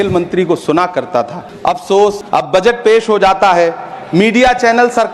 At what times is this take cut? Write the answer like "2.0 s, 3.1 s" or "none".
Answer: 1.4 s, 2.2 s